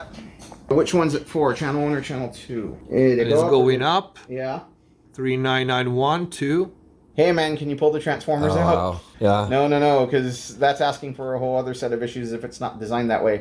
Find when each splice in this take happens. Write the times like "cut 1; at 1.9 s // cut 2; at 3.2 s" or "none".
cut 1; at 0.7 s // cut 2; at 2.7 s // cut 3; at 7.0 s // cut 4; at 9.0 s